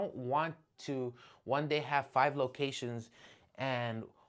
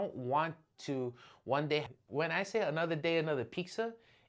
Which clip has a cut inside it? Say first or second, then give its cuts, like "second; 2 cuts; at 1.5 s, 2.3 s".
second; 1 cut; at 1.9 s